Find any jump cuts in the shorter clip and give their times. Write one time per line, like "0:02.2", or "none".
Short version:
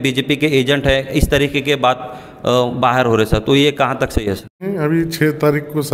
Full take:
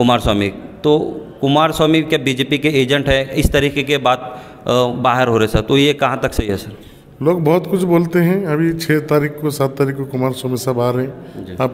0:04.7